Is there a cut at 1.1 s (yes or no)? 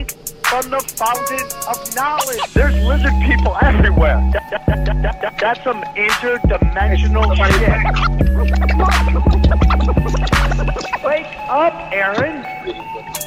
yes